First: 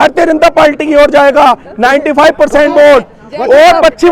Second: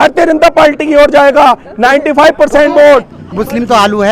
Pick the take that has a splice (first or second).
second